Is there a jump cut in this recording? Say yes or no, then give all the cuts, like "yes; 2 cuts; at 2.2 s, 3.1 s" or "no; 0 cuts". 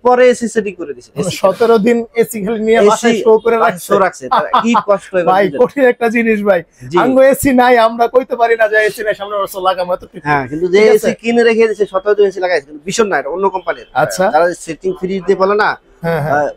no; 0 cuts